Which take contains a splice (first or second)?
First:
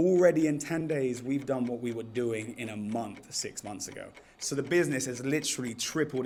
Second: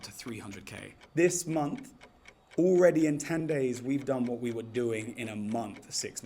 second